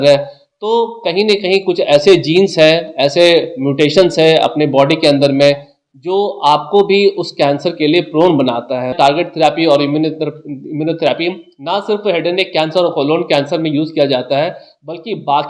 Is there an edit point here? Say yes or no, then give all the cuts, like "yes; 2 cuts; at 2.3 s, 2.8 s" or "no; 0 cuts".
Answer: yes; 1 cut; at 8.9 s